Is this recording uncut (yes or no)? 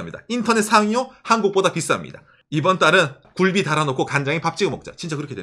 no